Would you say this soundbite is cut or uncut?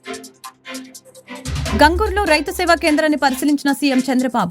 cut